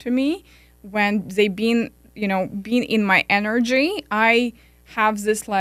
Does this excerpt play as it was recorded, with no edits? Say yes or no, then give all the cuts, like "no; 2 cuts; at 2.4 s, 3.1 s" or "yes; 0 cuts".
yes; 0 cuts